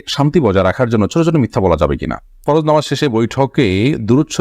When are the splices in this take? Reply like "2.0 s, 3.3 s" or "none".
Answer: 2.4 s